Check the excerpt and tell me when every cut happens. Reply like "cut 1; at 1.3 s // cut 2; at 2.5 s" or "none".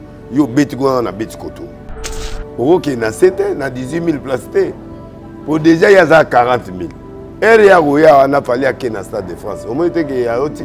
cut 1; at 2.1 s